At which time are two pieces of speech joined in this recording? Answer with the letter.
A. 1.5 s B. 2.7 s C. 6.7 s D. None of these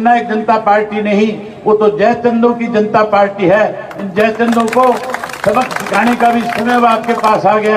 D